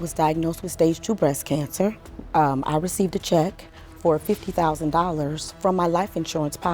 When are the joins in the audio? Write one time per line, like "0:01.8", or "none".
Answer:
0:02.1